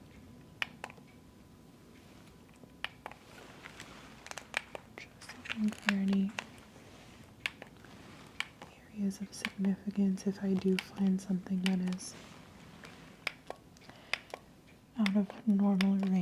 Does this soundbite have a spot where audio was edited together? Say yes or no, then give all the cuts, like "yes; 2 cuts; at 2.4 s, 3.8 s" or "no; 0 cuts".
no; 0 cuts